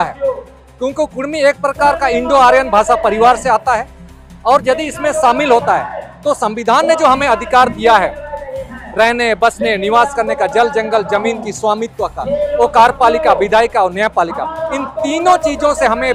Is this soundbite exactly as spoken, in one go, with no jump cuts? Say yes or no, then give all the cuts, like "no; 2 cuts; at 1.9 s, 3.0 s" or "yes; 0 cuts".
yes; 0 cuts